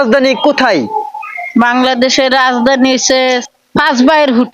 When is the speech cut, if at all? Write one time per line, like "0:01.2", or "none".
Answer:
0:03.5